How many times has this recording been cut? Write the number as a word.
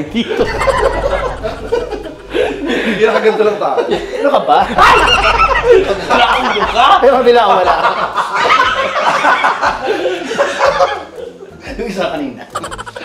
zero